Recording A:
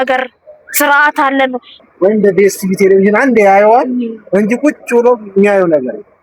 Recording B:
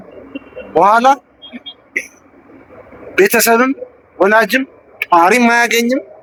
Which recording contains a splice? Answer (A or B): A